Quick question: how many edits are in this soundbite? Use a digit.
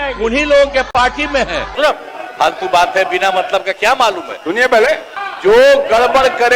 2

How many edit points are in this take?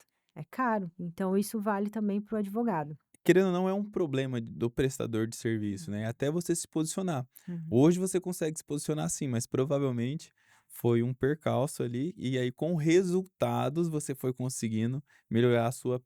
2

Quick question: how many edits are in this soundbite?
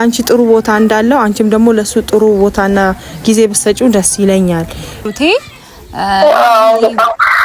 1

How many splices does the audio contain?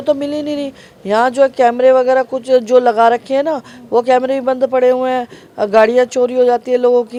0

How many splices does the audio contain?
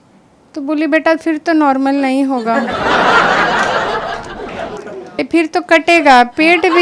1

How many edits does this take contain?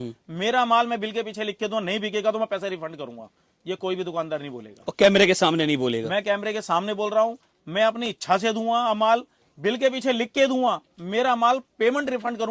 0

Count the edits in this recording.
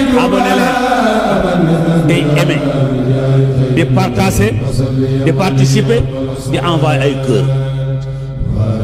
0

